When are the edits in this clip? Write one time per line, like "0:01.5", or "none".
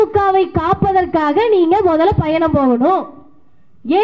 none